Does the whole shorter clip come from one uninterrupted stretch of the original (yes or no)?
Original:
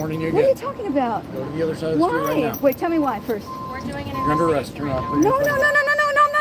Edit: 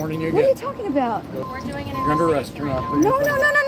no